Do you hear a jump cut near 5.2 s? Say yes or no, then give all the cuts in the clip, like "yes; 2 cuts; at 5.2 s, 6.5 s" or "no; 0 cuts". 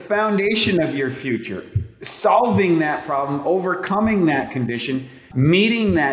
yes; 1 cut; at 5.2 s